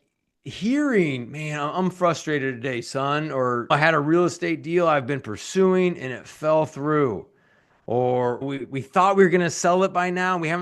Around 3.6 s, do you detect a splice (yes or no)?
yes